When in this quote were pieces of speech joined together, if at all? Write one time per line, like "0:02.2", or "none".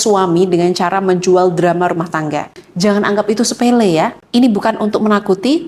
0:02.6